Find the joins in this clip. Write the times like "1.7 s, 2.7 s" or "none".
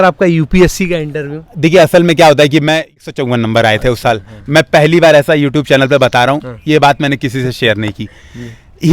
3.0 s